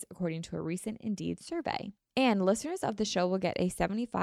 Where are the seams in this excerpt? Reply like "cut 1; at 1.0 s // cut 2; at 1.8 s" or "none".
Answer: cut 1; at 2.0 s